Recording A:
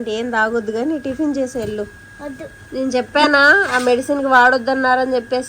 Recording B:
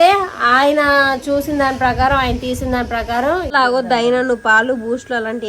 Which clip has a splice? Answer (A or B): B